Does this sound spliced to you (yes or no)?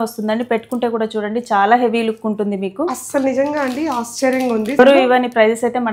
yes